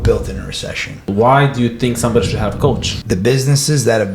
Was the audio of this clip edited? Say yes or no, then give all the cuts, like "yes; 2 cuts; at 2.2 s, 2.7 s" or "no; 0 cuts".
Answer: yes; 2 cuts; at 1.1 s, 2.9 s